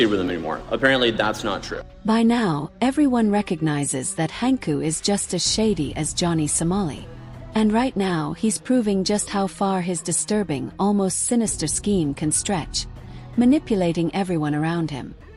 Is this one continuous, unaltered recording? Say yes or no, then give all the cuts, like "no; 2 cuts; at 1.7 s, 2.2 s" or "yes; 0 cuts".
yes; 0 cuts